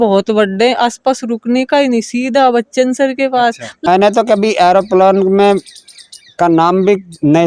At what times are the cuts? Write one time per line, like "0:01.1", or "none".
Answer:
0:03.9

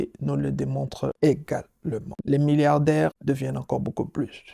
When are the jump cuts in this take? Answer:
0:01.1
0:02.1
0:03.2

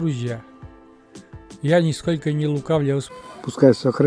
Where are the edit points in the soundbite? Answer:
0:03.1

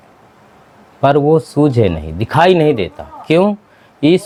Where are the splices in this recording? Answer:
none

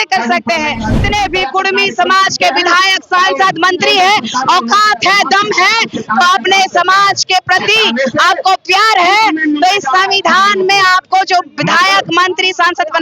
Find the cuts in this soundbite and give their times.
0:00.9

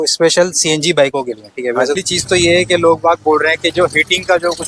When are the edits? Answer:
0:02.0

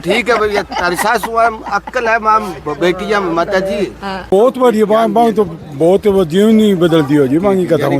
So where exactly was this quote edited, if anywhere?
0:04.3

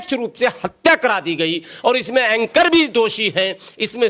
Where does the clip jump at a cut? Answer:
none

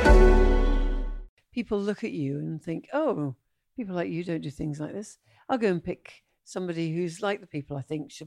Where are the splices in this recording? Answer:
0:01.3

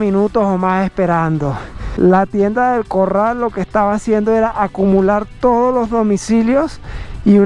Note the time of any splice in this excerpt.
none

